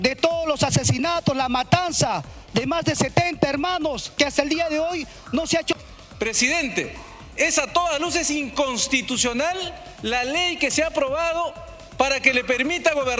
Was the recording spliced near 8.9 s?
no; 1 cut; at 5.7 s

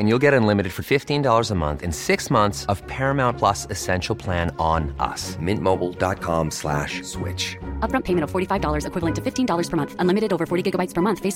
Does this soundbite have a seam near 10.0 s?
no; 0 cuts

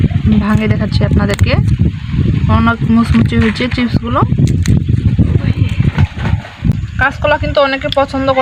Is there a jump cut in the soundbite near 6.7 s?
yes; 1 cut; at 6.7 s

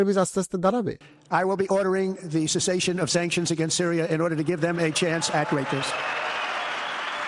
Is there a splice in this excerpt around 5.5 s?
no; 1 cut; at 0.9 s

